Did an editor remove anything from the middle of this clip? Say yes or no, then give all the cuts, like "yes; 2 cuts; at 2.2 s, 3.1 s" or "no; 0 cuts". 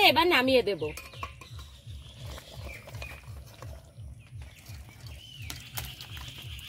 no; 0 cuts